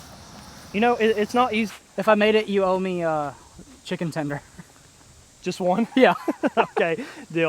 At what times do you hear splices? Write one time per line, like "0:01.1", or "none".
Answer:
0:01.7